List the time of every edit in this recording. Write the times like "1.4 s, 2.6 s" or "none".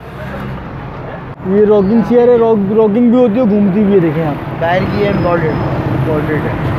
1.4 s